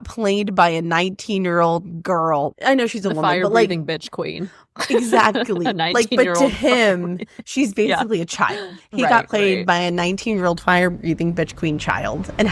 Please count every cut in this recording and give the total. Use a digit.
0